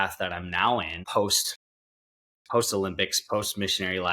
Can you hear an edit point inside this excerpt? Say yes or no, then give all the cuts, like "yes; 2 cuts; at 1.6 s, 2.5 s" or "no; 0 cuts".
yes; 1 cut; at 1.0 s